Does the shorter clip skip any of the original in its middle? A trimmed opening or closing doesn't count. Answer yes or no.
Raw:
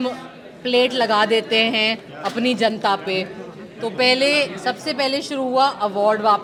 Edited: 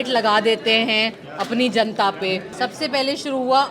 yes